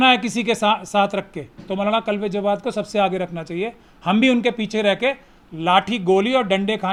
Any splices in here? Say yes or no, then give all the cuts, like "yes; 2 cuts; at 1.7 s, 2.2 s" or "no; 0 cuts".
no; 0 cuts